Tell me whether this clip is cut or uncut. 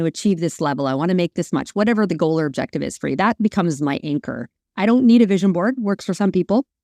uncut